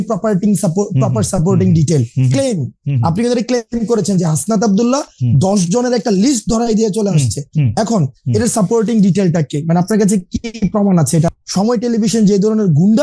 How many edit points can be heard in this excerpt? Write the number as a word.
one